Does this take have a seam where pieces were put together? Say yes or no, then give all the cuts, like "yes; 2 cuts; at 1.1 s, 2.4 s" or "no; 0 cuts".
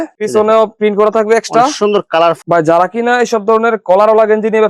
yes; 1 cut; at 2.4 s